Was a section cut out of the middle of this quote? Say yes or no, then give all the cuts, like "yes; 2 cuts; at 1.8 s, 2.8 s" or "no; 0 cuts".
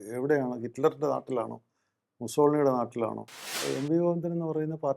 yes; 1 cut; at 3.6 s